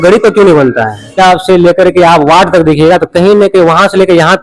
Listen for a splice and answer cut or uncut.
cut